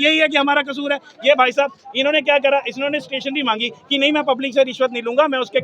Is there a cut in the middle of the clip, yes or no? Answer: no